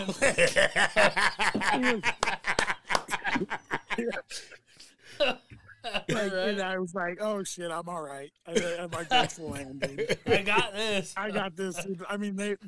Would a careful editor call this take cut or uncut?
cut